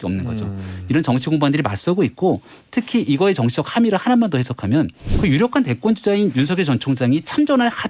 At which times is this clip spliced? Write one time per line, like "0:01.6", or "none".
0:05.1